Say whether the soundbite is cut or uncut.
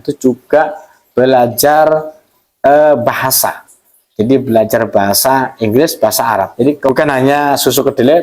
cut